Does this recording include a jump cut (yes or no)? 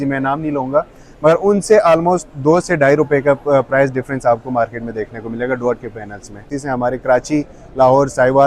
yes